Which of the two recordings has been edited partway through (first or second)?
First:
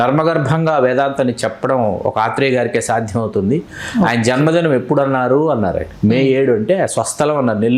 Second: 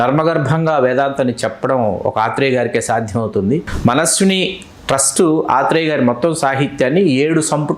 second